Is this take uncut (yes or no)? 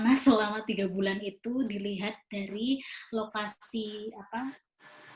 yes